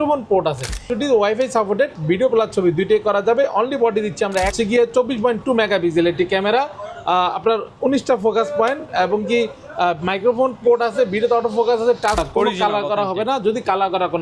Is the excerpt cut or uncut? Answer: cut